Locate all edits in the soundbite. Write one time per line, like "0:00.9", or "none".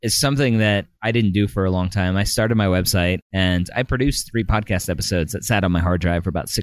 0:00.9
0:03.3